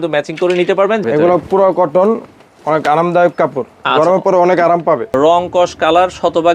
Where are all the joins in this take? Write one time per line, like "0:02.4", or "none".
0:01.0
0:05.1